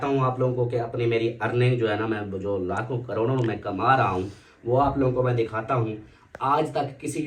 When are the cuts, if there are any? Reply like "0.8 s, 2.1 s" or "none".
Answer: none